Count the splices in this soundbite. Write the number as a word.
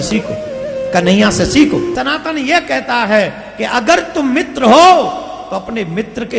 one